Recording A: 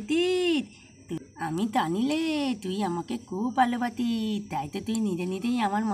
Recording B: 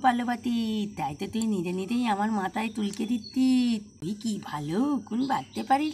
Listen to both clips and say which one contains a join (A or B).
B